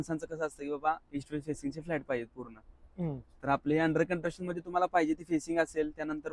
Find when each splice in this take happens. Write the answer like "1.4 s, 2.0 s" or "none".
none